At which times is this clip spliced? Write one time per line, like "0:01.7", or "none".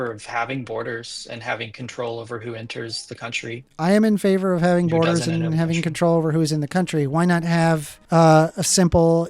0:07.9